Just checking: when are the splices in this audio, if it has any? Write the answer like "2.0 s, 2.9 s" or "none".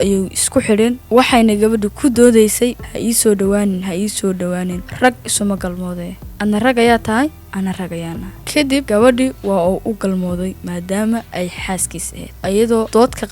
1.0 s, 2.9 s